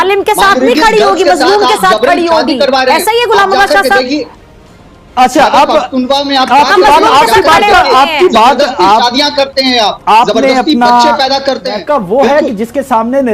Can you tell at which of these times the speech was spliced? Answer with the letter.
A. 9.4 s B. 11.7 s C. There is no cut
B